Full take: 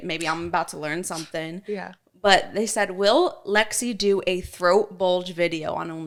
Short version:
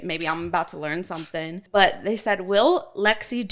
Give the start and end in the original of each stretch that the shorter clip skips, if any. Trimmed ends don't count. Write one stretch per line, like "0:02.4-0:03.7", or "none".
0:01.6-0:02.1